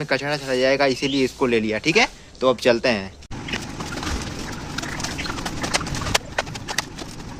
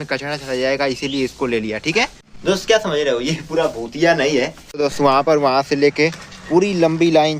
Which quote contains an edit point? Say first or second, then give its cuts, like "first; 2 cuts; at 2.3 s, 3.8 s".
second; 2 cuts; at 2.2 s, 4.6 s